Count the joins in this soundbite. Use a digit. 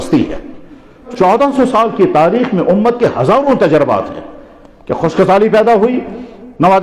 1